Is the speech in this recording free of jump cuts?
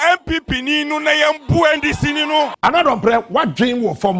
no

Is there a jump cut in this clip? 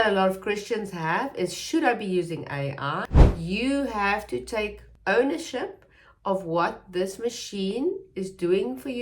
yes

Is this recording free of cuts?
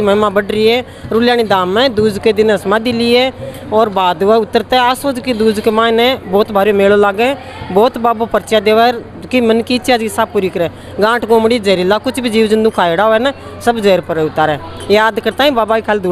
yes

